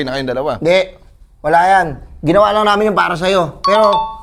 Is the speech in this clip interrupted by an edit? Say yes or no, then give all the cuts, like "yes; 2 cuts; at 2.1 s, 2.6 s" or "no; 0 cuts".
no; 0 cuts